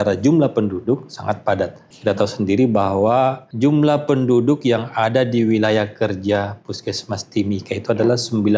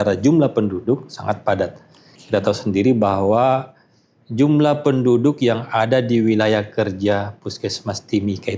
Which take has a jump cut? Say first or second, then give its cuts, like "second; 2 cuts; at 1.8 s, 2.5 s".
first; 2 cuts; at 1.8 s, 3.4 s